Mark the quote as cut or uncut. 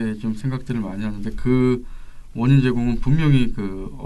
uncut